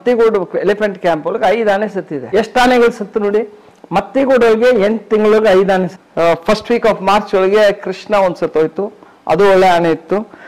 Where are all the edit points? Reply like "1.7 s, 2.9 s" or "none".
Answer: 2.2 s, 5.9 s